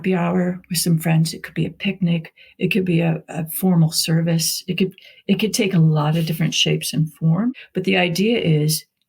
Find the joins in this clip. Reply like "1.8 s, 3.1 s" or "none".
7.5 s